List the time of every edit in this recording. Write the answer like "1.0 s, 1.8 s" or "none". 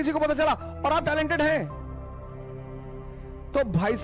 none